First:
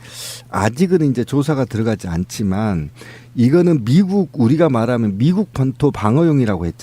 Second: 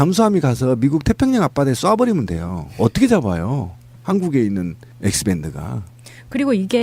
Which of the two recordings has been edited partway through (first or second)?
first